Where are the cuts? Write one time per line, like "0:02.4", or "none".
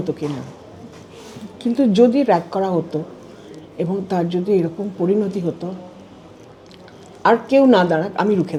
none